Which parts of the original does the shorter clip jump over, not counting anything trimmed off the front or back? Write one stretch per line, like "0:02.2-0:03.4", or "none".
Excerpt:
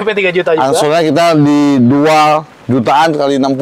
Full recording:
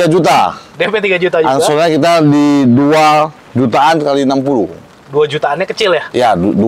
none